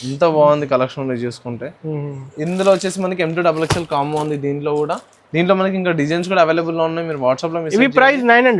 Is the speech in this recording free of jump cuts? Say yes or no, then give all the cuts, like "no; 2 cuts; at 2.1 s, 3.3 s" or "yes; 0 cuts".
yes; 0 cuts